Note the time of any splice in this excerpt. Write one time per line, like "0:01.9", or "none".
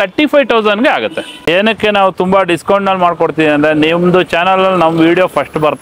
0:01.5